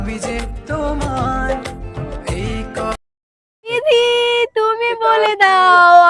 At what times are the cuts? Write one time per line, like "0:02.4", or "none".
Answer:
0:03.7